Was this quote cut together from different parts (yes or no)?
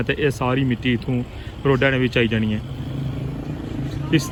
no